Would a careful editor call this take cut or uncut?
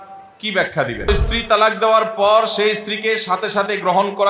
cut